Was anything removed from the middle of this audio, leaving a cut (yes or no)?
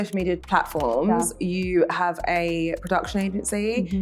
no